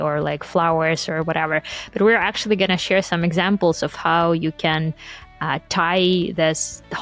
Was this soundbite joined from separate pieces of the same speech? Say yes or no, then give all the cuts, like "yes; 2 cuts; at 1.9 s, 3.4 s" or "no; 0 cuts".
no; 0 cuts